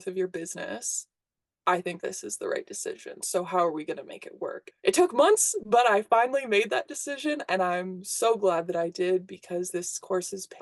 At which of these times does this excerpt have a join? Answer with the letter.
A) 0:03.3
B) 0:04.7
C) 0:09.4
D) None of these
B